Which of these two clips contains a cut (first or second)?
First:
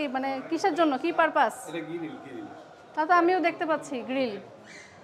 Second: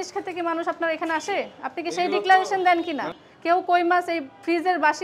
second